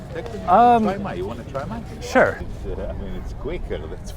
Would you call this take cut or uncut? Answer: cut